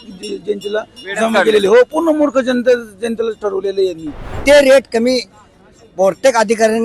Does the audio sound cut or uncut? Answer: cut